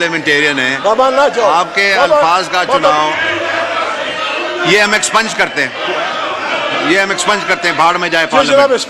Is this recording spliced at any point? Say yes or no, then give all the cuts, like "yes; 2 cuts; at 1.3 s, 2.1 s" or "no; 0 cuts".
no; 0 cuts